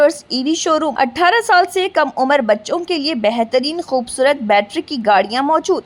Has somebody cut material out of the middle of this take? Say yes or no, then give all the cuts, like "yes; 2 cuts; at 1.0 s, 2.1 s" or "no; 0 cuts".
yes; 1 cut; at 0.9 s